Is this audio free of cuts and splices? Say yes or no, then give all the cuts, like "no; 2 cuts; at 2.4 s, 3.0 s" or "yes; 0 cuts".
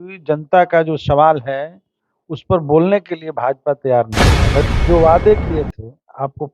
no; 1 cut; at 4.6 s